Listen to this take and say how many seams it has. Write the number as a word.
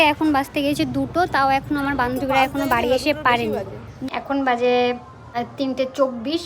two